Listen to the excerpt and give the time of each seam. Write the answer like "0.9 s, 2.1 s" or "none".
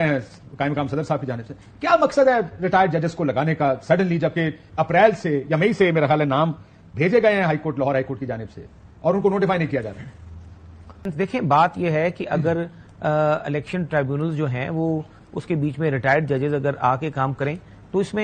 none